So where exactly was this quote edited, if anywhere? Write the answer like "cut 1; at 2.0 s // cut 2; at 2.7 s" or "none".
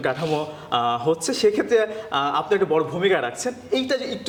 none